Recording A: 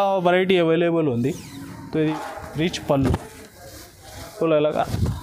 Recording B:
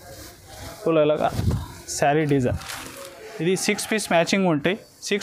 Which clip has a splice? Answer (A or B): A